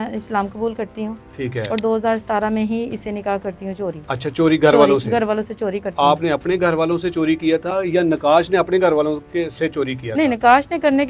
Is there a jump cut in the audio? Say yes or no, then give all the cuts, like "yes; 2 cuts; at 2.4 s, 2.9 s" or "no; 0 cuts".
no; 0 cuts